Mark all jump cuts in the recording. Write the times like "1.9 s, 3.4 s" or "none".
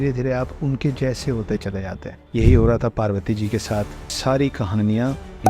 4.1 s